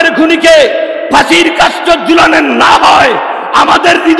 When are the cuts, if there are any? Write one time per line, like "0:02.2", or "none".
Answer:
none